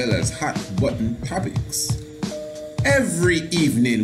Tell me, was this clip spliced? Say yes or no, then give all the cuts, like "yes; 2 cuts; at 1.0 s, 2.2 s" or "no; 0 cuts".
no; 0 cuts